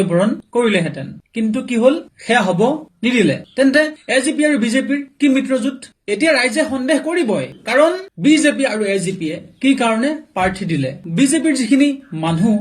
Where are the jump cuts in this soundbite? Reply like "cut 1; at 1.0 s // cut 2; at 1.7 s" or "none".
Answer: cut 1; at 11.0 s

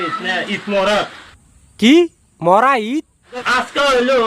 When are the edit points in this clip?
cut 1; at 3.2 s

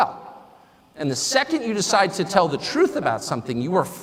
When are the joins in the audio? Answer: none

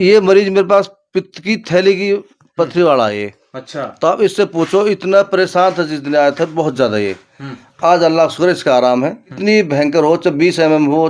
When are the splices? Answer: cut 1; at 9.3 s

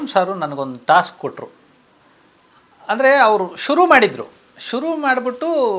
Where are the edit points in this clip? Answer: none

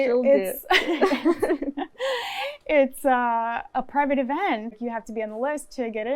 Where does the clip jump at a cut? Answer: cut 1; at 4.8 s

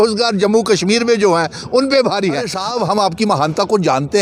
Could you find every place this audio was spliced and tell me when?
cut 1; at 2.6 s

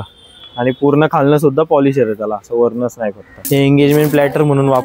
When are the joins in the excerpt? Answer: cut 1; at 3.3 s

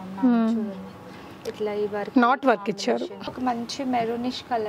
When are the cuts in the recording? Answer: cut 1; at 3.3 s

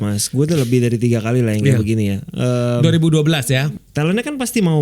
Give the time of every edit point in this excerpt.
cut 1; at 3.7 s

